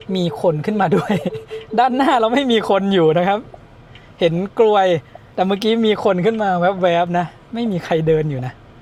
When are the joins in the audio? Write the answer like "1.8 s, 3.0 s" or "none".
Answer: none

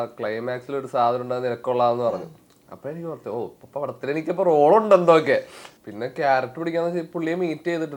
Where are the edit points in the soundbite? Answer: none

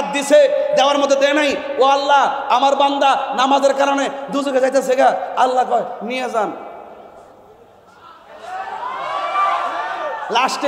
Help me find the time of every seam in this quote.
none

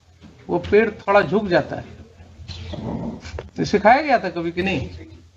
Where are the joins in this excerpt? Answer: 3.5 s

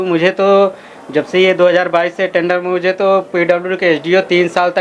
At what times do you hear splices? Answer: none

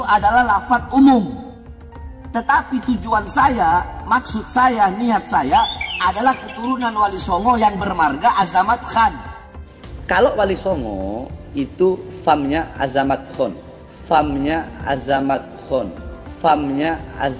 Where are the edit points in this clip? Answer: 9.5 s

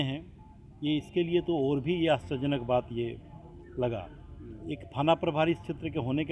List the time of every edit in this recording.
4.6 s

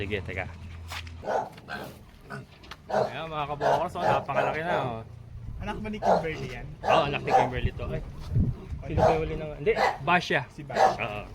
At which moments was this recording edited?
1.0 s

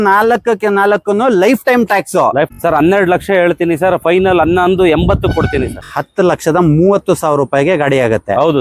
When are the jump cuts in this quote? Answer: 2.5 s, 5.8 s

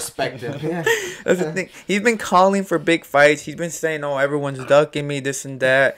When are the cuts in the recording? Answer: none

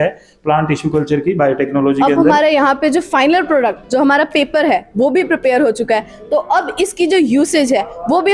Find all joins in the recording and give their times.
2.1 s

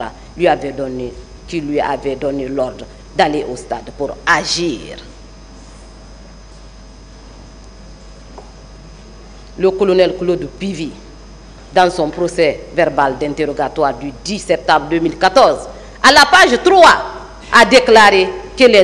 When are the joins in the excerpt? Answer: none

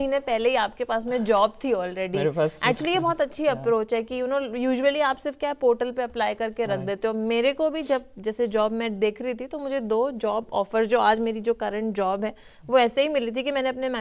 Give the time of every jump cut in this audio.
none

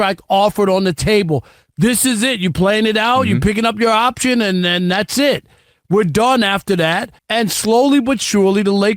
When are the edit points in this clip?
7.1 s

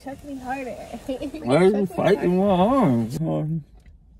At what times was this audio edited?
3.2 s

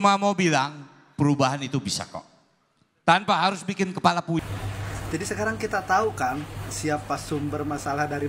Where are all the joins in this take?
4.4 s

